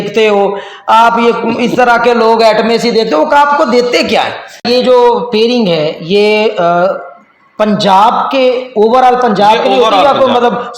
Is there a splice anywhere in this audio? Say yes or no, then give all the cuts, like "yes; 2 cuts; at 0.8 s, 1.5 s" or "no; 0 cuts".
yes; 1 cut; at 4.7 s